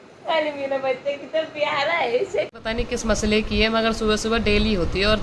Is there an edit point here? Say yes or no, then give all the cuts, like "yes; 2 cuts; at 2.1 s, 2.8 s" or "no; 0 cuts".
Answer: yes; 1 cut; at 2.5 s